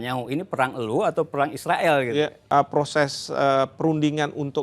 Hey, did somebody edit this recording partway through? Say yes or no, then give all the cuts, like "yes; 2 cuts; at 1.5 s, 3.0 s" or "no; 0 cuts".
yes; 1 cut; at 2.4 s